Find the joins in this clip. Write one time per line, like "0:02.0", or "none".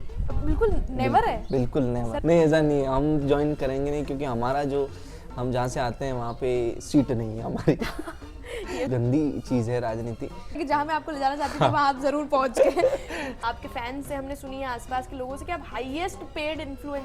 0:02.1
0:08.9
0:10.6
0:13.2